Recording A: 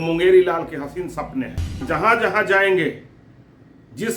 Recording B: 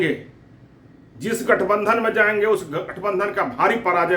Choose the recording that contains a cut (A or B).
A